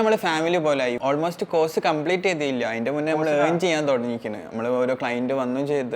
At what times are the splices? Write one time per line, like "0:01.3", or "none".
0:01.0